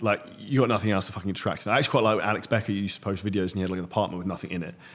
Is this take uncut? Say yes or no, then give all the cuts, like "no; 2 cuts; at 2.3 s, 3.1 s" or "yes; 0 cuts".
yes; 0 cuts